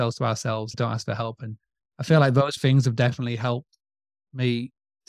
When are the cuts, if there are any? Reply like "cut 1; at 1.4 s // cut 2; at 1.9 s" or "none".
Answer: cut 1; at 2.6 s